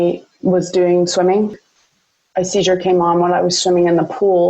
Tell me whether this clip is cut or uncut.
cut